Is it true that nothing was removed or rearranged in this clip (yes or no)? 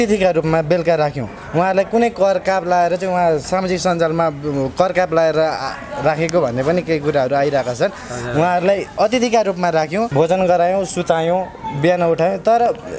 no